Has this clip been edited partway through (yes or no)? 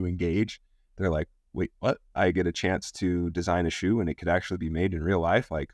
no